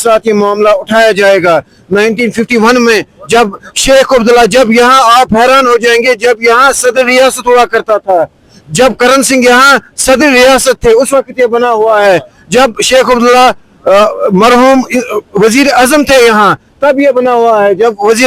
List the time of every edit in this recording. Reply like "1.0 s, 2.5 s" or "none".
none